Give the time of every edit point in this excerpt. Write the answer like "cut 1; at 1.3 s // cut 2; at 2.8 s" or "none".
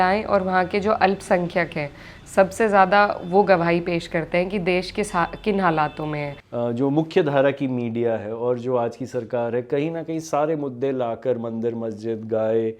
cut 1; at 6.4 s